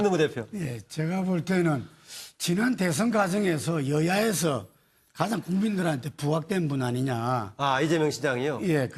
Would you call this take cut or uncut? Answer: uncut